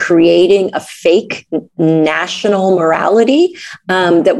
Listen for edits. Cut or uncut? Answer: uncut